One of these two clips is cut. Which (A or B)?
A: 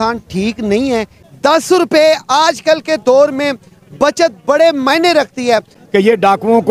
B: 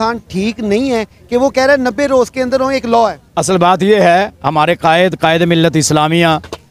A